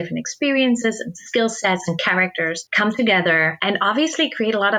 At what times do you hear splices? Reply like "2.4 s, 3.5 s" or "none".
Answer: 2.6 s, 3.5 s